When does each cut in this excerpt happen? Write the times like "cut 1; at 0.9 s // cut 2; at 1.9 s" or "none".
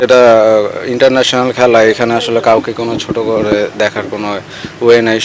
none